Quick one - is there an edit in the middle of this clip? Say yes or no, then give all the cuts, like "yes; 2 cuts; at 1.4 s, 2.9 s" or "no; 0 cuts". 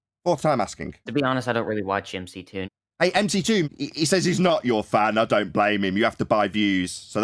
yes; 3 cuts; at 1.1 s, 2.6 s, 3.7 s